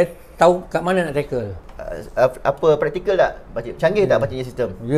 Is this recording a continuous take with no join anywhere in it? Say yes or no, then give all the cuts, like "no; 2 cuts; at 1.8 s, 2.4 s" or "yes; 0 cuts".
no; 1 cut; at 1.6 s